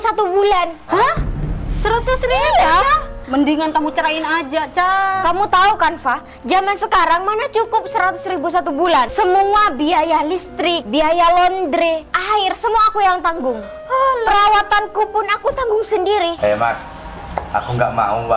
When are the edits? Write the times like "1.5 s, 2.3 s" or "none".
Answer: 3.1 s, 9.1 s, 10.8 s, 12.1 s, 16.4 s